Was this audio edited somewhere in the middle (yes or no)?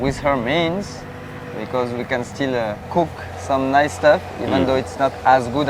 yes